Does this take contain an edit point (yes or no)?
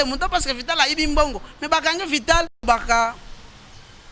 yes